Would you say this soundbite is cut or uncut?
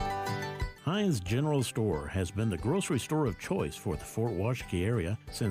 cut